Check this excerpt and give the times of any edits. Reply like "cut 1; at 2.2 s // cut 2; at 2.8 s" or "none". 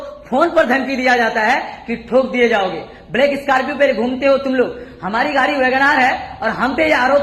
none